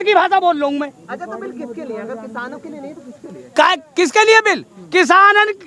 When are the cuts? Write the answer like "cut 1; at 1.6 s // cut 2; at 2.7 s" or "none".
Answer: none